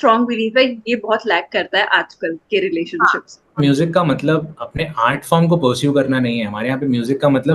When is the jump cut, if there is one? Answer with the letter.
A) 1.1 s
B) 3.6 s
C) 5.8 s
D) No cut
B